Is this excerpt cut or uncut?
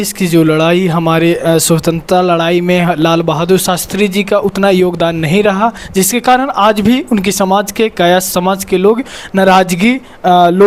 uncut